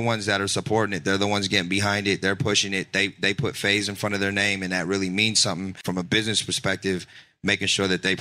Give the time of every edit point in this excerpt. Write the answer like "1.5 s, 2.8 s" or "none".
5.8 s